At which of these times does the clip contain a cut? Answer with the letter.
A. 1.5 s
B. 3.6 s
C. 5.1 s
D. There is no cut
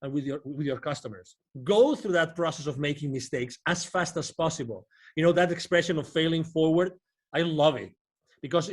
A